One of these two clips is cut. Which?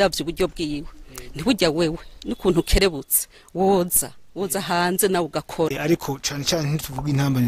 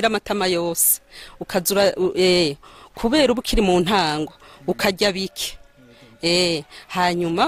first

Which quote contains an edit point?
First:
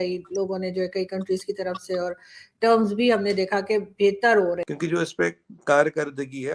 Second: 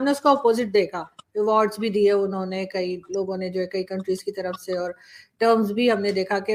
first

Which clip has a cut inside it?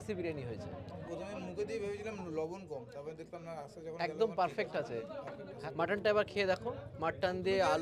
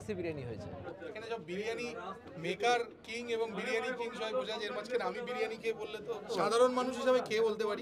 second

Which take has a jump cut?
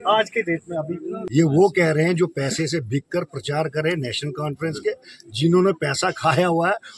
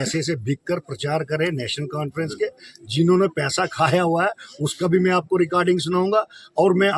first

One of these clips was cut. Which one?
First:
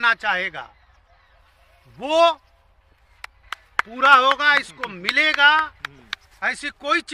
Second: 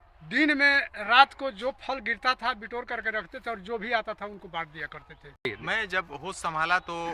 second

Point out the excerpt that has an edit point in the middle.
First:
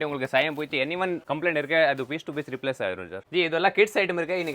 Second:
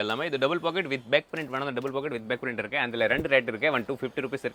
first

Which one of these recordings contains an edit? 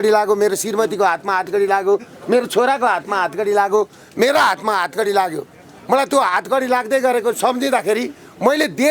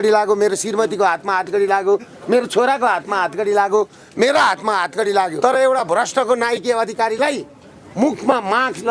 second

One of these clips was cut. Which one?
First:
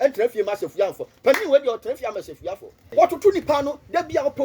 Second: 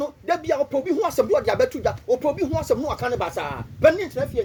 first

